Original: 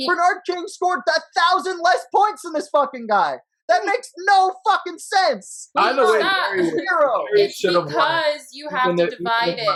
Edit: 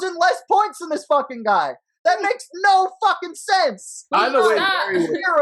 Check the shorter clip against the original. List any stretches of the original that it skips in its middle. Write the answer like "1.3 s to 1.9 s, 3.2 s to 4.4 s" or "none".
none

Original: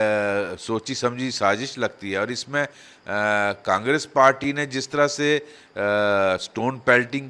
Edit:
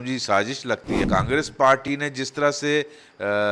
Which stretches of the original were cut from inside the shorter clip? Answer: 2.1 s to 3.6 s

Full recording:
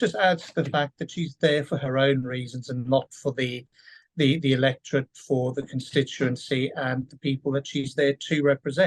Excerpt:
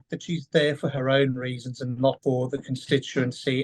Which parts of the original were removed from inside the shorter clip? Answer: 3.1 s to 5.2 s

